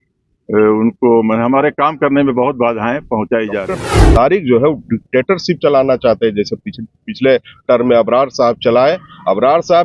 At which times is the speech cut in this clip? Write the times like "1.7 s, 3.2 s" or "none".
3.9 s